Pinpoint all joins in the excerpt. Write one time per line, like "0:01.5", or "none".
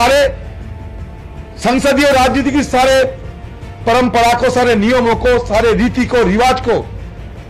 none